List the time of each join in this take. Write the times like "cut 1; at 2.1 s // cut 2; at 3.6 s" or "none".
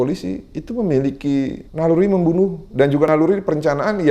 cut 1; at 1.6 s // cut 2; at 3.1 s

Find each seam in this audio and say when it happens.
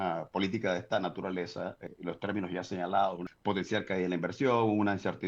cut 1; at 1.9 s // cut 2; at 3.3 s

